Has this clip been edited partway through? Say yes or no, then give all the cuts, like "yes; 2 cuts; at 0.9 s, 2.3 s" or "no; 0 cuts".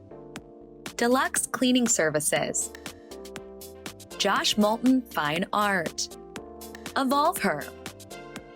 yes; 3 cuts; at 2.6 s, 4.2 s, 7.6 s